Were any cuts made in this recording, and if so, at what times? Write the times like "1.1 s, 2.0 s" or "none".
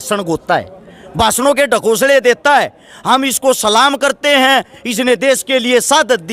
none